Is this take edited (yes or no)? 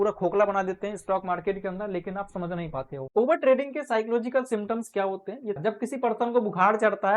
yes